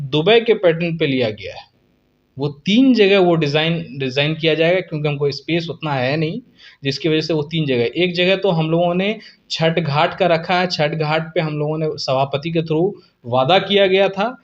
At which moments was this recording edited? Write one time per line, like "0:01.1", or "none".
none